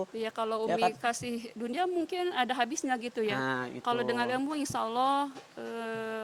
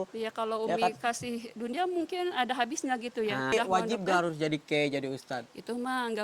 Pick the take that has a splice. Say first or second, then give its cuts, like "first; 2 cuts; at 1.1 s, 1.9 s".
second; 1 cut; at 3.5 s